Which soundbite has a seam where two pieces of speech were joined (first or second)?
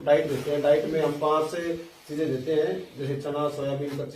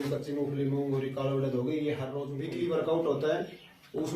second